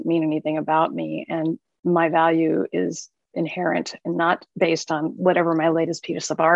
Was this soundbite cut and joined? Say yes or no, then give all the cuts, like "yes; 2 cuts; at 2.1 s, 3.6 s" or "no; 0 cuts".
no; 0 cuts